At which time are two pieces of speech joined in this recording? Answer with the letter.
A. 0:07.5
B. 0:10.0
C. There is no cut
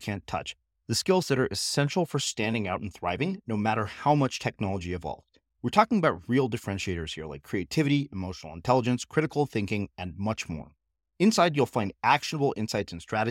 C